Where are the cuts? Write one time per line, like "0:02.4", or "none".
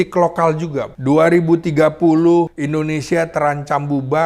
0:00.9
0:02.6

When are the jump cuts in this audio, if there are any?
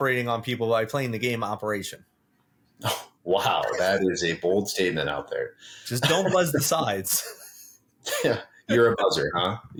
none

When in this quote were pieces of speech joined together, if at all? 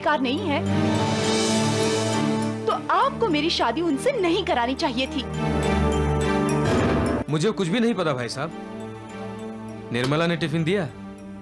0:07.2

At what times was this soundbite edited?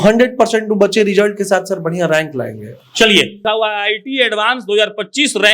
0:03.4

